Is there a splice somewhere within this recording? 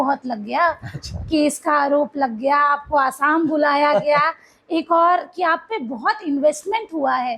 no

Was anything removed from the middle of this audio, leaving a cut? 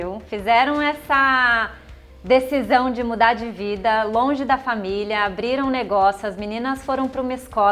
no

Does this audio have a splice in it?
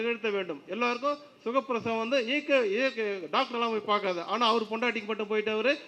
no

